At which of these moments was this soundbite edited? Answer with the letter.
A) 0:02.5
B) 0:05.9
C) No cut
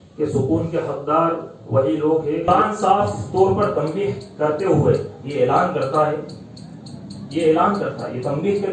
A